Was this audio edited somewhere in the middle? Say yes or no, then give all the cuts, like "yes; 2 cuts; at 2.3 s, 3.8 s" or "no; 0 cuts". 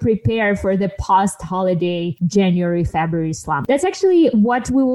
yes; 2 cuts; at 2.1 s, 3.5 s